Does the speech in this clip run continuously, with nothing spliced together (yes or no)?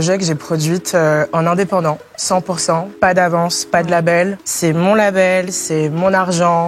yes